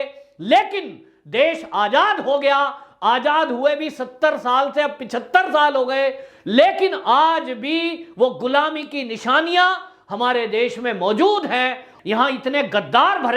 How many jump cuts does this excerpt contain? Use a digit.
1